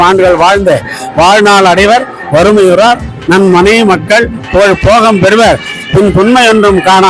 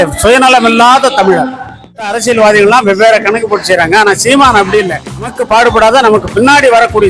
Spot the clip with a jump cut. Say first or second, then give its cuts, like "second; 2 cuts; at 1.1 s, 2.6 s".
second; 2 cuts; at 2.0 s, 5.4 s